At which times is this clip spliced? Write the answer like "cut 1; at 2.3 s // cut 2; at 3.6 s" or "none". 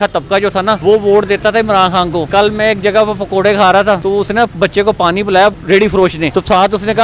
cut 1; at 0.8 s // cut 2; at 2.3 s // cut 3; at 4.0 s // cut 4; at 5.8 s